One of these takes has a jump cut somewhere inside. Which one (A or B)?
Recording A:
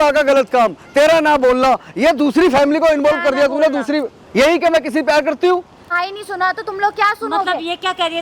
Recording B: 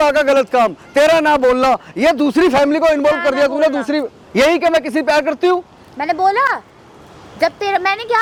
A